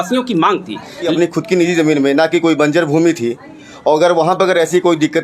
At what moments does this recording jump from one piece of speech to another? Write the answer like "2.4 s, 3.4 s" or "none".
1.1 s